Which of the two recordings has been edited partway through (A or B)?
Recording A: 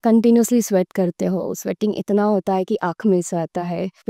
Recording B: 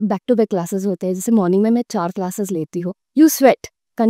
B